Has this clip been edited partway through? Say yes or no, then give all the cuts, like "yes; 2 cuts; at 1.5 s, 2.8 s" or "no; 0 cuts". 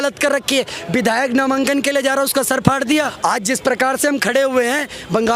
yes; 1 cut; at 3.1 s